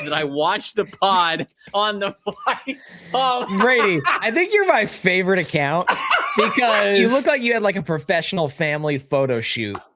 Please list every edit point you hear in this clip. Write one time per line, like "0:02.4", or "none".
0:04.2
0:07.0